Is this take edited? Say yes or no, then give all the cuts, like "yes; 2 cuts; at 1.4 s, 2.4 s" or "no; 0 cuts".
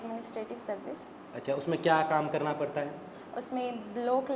no; 0 cuts